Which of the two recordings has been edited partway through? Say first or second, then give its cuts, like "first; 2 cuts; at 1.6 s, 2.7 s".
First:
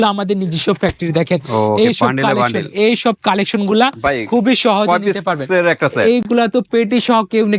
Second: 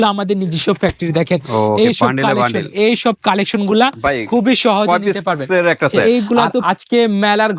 second; 1 cut; at 6.6 s